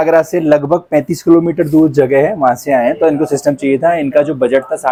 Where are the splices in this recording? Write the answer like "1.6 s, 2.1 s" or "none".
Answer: none